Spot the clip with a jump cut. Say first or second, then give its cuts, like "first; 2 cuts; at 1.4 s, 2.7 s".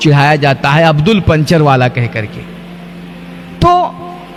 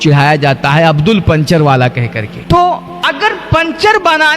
second; 2 cuts; at 2.3 s, 2.9 s